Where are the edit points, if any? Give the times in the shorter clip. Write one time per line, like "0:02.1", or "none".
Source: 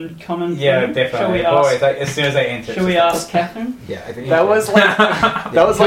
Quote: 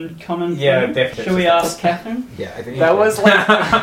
0:01.1